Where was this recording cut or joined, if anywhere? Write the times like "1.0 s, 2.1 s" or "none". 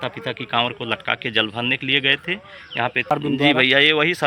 3.1 s